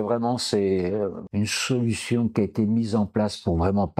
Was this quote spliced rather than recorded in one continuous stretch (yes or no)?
no